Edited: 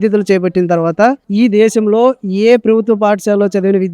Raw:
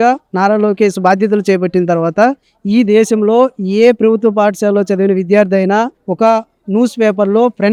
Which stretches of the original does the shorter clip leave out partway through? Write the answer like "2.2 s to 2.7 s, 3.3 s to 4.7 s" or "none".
2.4 s to 2.6 s